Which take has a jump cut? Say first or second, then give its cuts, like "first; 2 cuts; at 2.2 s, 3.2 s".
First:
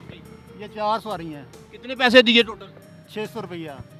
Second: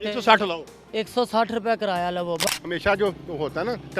second; 1 cut; at 2.4 s